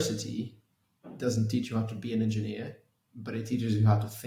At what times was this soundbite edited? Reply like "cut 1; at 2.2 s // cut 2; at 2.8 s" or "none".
none